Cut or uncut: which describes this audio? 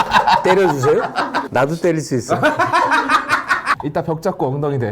cut